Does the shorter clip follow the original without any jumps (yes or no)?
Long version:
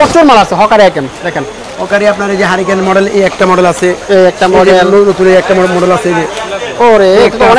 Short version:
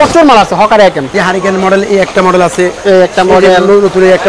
no